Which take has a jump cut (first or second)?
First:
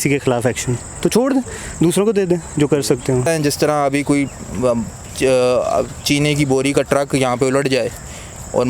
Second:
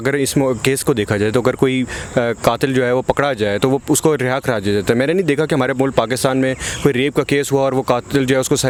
first